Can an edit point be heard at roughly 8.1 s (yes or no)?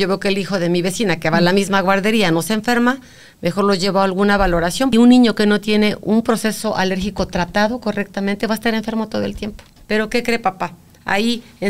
no